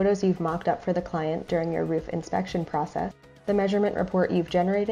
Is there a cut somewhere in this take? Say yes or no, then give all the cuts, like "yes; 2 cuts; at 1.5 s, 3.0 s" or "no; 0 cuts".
yes; 1 cut; at 3.3 s